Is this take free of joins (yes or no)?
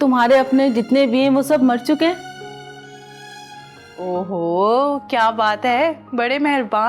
no